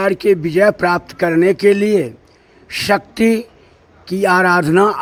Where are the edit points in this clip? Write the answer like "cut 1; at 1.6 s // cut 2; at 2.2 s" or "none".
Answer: none